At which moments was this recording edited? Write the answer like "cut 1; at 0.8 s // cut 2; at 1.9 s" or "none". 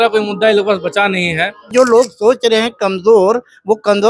cut 1; at 1.7 s